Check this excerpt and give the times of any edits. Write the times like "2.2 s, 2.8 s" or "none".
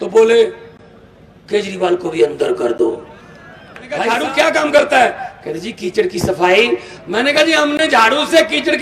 4.0 s